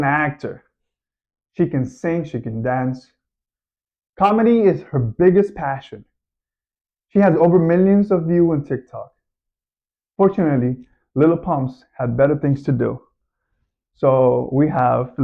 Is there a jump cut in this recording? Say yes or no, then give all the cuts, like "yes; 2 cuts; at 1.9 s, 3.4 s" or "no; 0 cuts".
no; 0 cuts